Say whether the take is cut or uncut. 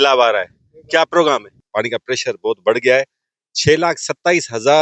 cut